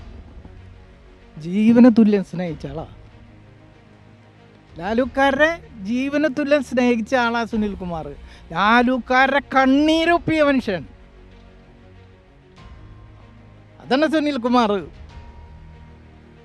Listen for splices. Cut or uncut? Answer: uncut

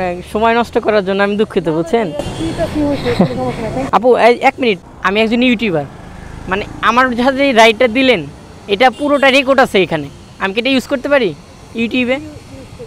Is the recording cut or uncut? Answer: cut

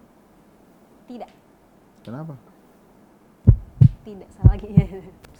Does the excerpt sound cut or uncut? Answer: uncut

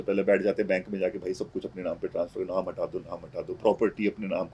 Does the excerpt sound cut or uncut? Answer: uncut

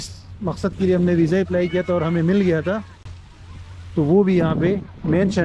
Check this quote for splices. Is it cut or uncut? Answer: uncut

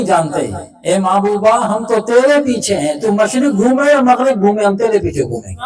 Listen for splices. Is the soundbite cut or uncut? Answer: uncut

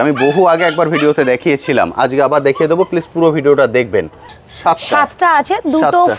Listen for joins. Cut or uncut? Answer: cut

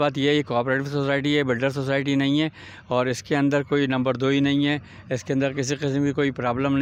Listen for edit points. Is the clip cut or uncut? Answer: uncut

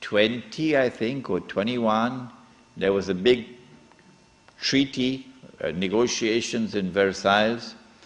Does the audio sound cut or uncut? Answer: cut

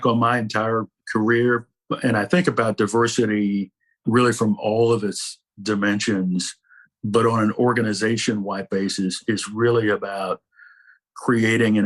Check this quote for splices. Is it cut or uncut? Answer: cut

